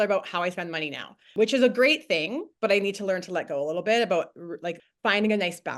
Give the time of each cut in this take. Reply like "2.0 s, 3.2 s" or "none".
1.3 s, 4.9 s